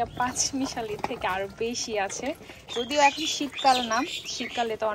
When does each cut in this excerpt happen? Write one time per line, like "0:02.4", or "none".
0:02.7